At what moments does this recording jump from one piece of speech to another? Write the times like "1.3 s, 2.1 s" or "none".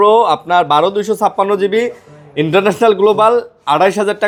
none